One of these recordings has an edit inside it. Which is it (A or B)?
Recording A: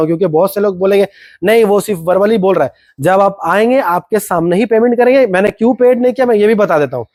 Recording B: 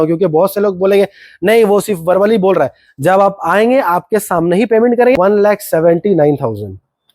B